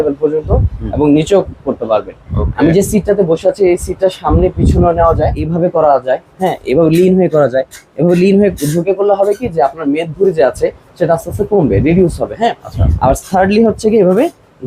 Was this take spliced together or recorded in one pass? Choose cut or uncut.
cut